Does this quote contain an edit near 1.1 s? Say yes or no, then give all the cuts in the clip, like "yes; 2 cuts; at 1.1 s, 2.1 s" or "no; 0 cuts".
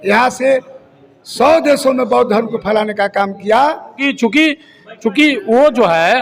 no; 1 cut; at 4.0 s